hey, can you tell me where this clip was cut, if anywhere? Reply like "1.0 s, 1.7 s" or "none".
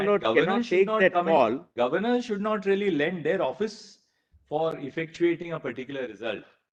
none